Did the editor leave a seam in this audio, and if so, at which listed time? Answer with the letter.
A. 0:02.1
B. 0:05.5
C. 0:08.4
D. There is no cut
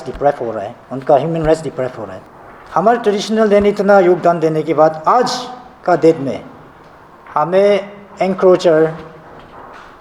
A